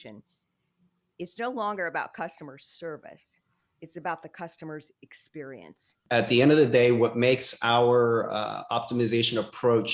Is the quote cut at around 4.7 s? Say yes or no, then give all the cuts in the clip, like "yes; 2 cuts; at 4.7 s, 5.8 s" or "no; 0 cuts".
no; 1 cut; at 5.9 s